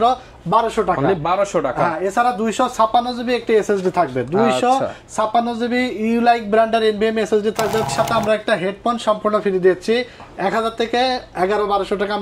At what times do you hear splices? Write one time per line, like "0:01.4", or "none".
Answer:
0:07.9